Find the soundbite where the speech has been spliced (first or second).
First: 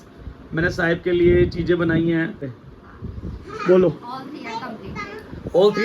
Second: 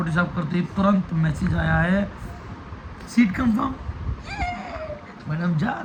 first